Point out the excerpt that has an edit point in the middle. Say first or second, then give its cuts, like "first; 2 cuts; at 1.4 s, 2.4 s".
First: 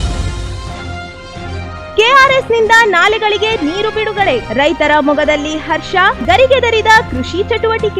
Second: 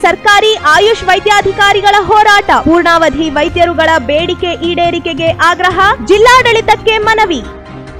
first; 1 cut; at 0.9 s